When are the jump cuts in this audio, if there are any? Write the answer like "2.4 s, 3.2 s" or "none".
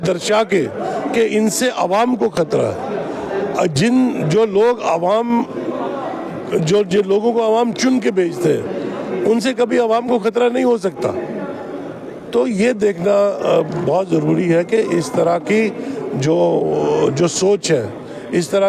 none